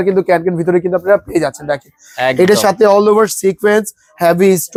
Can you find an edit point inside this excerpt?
no; 0 cuts

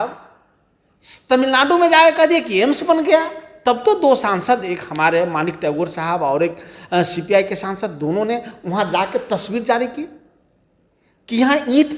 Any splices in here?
no; 0 cuts

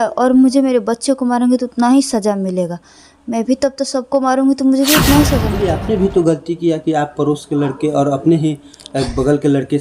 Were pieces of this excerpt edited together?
yes; 1 cut; at 5.5 s

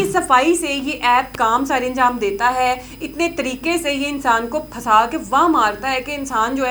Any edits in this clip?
no; 0 cuts

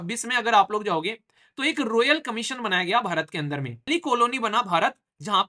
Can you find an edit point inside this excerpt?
yes; 1 cut; at 3.8 s

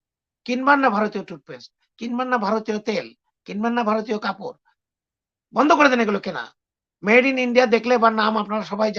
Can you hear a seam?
no; 0 cuts

